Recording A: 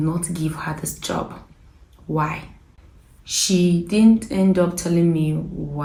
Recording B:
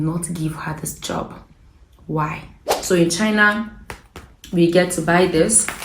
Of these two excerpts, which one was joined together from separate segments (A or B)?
B